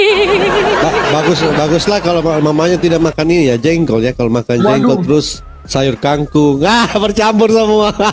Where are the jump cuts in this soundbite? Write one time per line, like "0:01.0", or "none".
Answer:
none